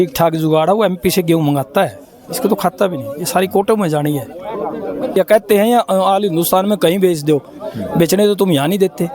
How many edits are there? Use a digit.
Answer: 1